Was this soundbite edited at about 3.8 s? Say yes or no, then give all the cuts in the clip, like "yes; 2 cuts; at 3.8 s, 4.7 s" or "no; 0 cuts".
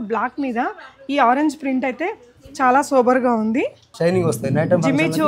yes; 1 cut; at 3.8 s